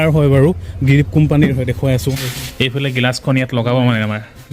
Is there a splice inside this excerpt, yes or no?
yes